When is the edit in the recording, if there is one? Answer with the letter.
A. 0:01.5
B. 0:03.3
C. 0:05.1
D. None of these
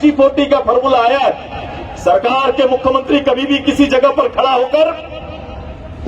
D